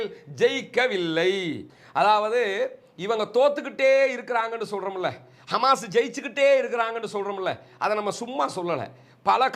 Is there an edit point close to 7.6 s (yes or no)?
no